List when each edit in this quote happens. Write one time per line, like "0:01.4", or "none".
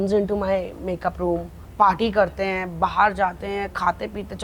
0:01.6